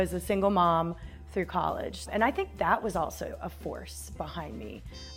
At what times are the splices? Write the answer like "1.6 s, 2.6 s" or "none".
2.1 s